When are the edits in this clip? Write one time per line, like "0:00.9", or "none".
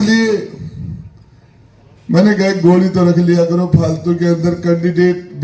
none